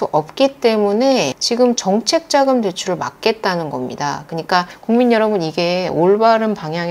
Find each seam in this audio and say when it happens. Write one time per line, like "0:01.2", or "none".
0:04.7